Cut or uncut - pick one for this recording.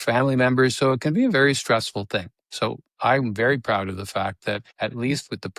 cut